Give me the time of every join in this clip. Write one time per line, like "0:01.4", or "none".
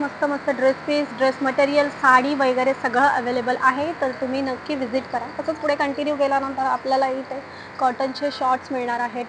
none